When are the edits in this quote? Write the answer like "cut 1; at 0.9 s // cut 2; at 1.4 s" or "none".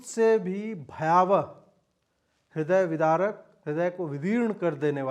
cut 1; at 3.5 s